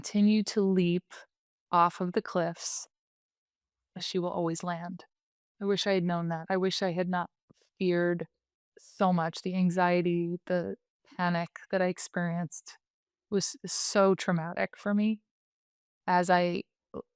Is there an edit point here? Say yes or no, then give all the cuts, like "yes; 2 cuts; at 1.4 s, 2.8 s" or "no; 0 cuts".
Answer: yes; 1 cut; at 3.9 s